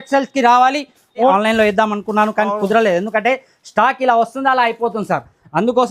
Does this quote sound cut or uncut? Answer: cut